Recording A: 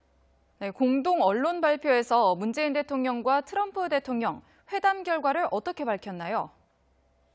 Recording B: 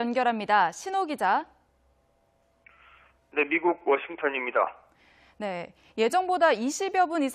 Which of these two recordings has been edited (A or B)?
A